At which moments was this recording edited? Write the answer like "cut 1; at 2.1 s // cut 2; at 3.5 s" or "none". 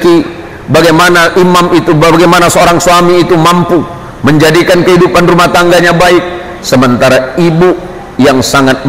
none